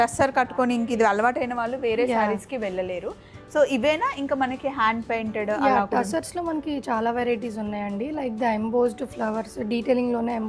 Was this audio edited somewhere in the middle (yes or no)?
no